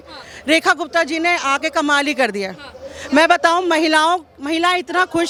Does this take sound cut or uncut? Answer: uncut